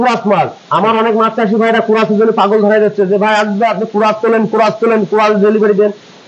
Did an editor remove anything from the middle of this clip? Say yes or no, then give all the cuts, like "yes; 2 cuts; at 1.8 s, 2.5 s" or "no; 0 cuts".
no; 0 cuts